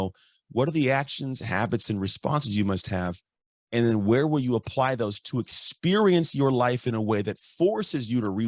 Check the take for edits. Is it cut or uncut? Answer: uncut